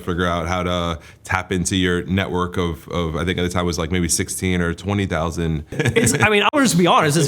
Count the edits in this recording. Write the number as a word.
one